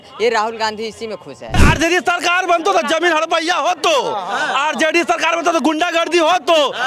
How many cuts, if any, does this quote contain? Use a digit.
1